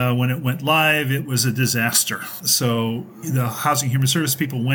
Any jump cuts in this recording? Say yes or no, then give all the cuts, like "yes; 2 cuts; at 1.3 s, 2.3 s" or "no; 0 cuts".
yes; 1 cut; at 2.3 s